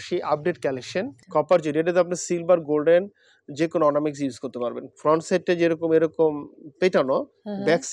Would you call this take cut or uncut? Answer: cut